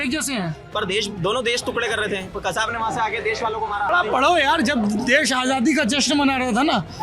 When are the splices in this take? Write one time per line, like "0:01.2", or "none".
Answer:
0:03.9